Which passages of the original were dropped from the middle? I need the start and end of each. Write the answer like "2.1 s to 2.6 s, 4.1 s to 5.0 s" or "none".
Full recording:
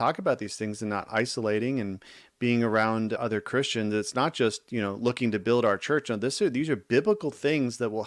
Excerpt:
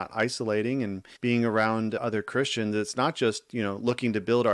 2.0 s to 2.2 s